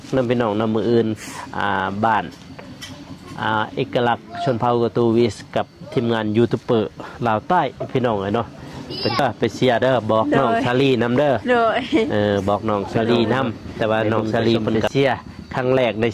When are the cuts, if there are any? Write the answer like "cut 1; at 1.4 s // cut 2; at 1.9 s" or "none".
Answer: cut 1; at 9.2 s // cut 2; at 14.8 s